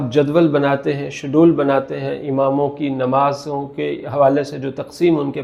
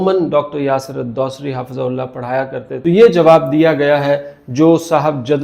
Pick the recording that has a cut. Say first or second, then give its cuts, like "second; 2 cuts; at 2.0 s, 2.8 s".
second; 1 cut; at 2.7 s